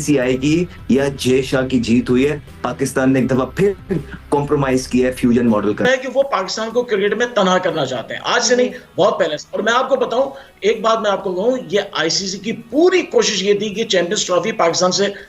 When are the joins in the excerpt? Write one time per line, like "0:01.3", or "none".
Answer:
0:05.8